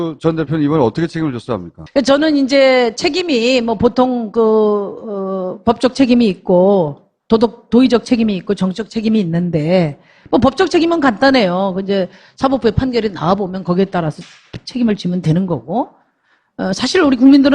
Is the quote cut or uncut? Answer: cut